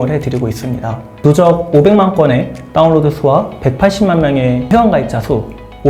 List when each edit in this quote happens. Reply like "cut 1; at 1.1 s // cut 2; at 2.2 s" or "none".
cut 1; at 1.1 s // cut 2; at 4.6 s